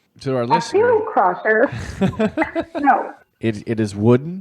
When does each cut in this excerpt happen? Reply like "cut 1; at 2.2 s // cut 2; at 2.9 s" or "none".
cut 1; at 3.2 s